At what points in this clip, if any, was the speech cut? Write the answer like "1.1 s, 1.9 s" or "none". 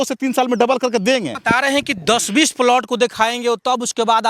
1.3 s